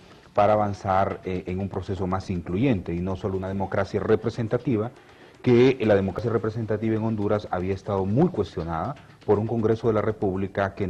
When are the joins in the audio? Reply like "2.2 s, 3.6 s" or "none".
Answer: none